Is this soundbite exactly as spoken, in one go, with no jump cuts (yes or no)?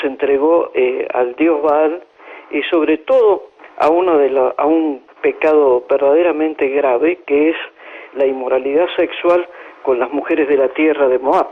yes